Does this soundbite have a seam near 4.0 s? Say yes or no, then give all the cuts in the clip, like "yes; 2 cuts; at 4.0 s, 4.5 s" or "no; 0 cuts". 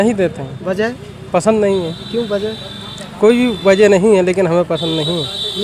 no; 0 cuts